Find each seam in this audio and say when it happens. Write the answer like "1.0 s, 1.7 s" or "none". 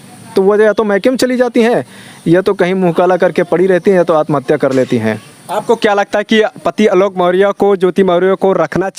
none